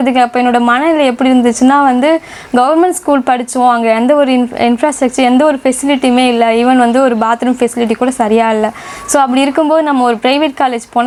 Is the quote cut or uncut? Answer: uncut